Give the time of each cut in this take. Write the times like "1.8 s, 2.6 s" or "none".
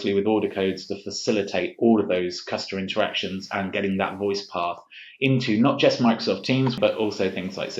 6.8 s